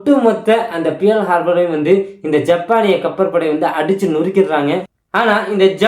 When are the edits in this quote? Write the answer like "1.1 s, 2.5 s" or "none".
4.8 s